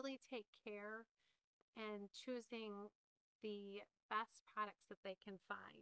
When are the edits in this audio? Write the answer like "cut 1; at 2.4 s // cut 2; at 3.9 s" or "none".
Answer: none